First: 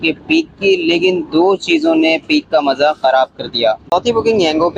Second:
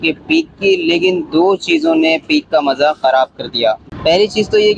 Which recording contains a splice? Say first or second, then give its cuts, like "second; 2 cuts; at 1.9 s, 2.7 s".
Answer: first; 1 cut; at 3.8 s